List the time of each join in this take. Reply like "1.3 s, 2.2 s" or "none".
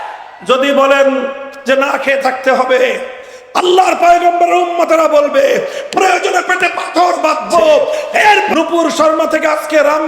8.5 s